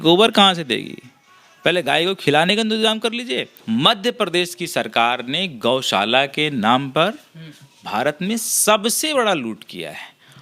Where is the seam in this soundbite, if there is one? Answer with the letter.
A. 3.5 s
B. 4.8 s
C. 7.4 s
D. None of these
A